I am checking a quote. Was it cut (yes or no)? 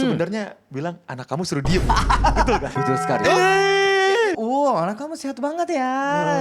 yes